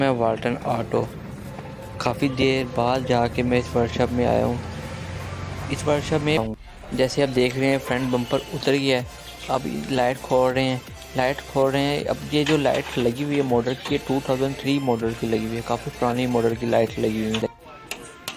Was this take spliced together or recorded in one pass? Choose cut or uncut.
cut